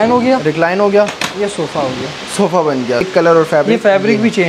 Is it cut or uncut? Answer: cut